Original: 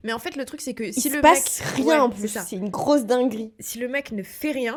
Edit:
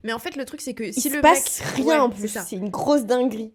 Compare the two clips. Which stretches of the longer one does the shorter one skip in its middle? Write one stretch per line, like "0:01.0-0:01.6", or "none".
none